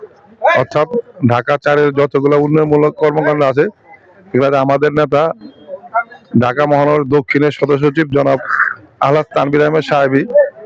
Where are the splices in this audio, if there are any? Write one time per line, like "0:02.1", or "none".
none